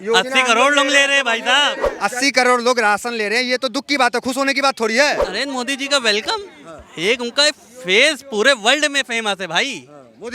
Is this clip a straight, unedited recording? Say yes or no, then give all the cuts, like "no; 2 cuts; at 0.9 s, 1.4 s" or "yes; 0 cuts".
no; 2 cuts; at 1.9 s, 5.3 s